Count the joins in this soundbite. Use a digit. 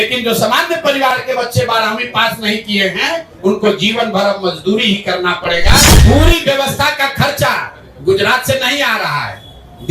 1